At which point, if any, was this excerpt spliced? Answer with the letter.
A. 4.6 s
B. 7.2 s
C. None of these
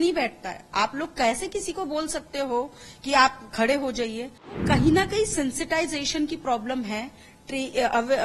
A